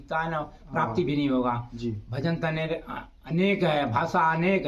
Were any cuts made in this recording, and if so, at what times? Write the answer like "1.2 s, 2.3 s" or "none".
none